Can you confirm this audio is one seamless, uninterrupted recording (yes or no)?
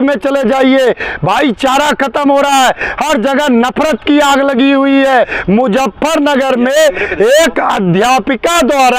no